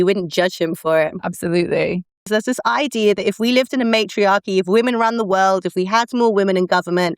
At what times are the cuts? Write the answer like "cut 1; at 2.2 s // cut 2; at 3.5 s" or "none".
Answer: cut 1; at 2.1 s